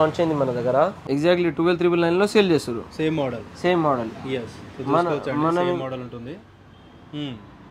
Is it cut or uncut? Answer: cut